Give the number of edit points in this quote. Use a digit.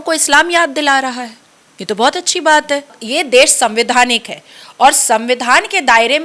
1